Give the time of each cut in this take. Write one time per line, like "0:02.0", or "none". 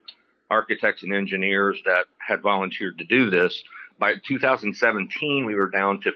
0:03.9